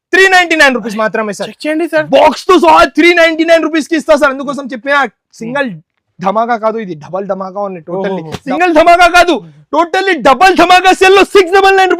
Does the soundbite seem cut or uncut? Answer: cut